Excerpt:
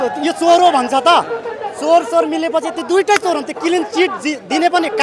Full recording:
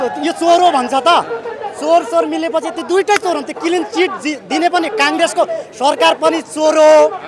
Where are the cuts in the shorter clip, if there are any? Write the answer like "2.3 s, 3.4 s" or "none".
none